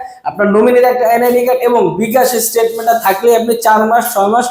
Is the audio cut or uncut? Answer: uncut